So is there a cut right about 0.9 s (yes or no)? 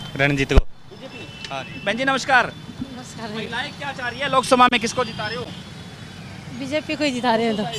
no